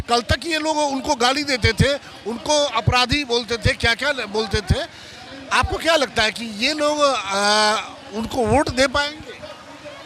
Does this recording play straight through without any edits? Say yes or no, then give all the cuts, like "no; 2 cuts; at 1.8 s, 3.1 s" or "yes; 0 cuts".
yes; 0 cuts